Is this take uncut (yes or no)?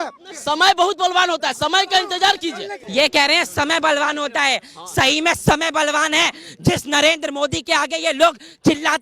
no